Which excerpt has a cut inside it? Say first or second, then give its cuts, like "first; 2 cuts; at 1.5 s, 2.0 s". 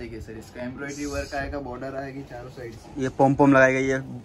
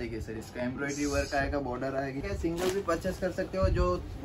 second; 1 cut; at 2.2 s